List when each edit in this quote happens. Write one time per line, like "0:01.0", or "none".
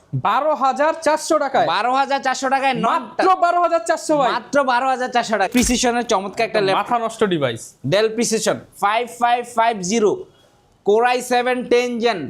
0:05.5